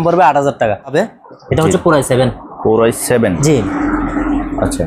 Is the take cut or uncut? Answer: cut